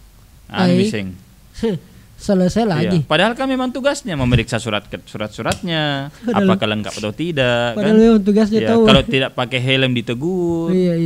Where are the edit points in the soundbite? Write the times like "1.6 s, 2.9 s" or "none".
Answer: none